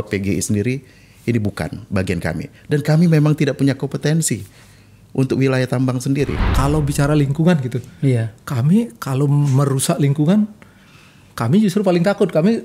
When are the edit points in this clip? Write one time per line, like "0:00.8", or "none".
0:06.4